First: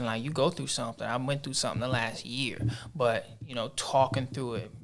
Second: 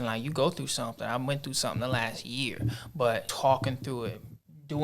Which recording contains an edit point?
second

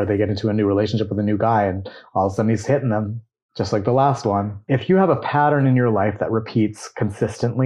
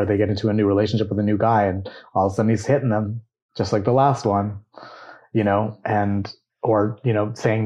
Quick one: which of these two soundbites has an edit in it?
first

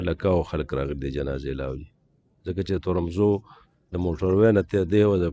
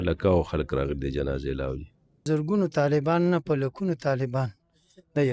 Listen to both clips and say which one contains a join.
second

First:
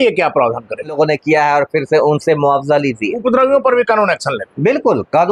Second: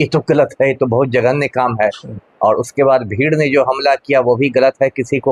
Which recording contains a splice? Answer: first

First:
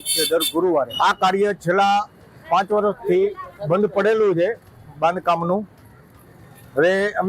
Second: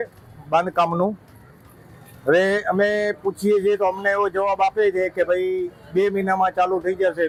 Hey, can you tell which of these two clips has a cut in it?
first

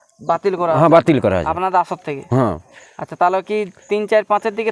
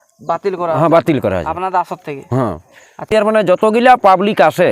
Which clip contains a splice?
second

